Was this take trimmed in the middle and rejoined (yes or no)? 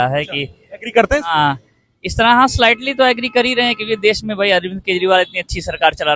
no